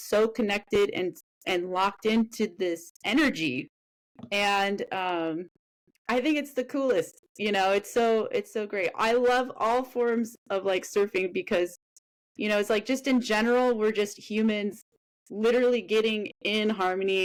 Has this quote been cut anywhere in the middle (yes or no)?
no